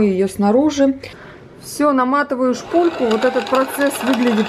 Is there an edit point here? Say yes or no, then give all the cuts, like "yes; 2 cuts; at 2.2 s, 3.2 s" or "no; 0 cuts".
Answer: yes; 1 cut; at 1.1 s